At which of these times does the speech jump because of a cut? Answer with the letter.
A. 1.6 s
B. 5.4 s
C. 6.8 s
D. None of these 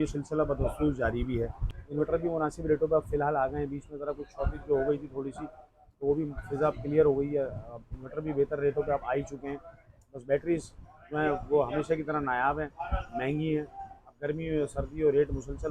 A